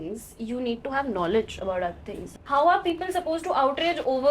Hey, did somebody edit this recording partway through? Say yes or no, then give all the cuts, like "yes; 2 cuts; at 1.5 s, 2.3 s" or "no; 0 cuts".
no; 0 cuts